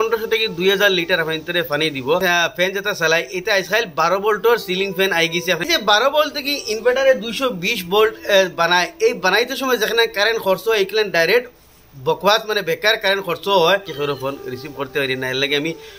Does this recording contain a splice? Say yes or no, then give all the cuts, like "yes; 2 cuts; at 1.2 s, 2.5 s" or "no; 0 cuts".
yes; 3 cuts; at 2.2 s, 5.6 s, 13.9 s